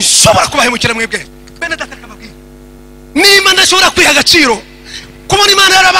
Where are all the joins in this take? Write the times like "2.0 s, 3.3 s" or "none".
1.3 s, 2.8 s

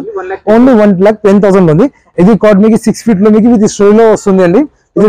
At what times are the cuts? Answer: 2.0 s

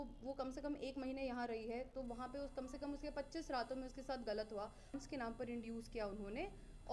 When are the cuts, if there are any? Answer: 5.0 s

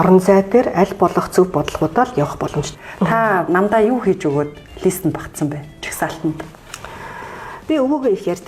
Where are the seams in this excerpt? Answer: 2.7 s, 6.5 s

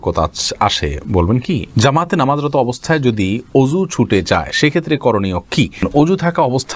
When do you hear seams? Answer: 1.7 s, 5.9 s

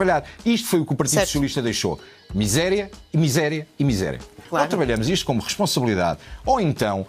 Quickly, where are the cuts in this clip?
4.4 s

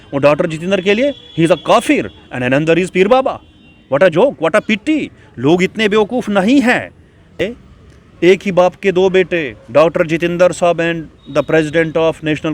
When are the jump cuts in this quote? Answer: 7.4 s

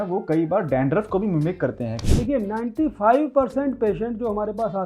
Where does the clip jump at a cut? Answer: 2.0 s

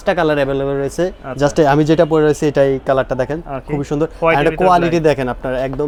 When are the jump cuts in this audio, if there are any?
none

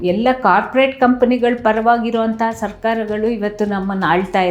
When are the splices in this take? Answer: none

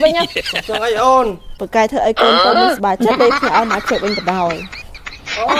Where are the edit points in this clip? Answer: 1.5 s

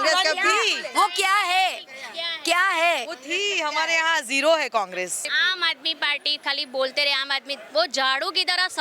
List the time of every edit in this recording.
5.2 s

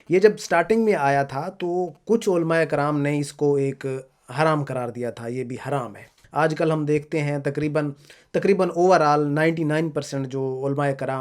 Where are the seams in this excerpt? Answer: 6.2 s

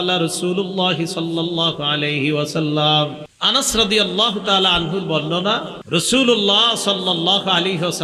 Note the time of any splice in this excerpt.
3.3 s, 5.8 s

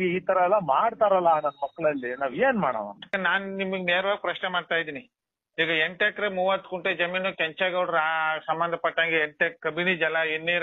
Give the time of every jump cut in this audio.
3.2 s, 5.4 s

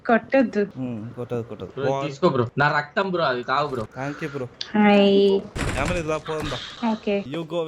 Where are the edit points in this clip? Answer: 2.5 s, 4.0 s, 5.6 s, 6.7 s

